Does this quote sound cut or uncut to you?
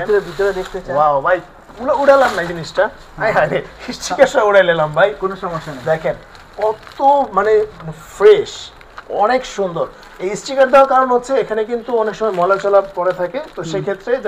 uncut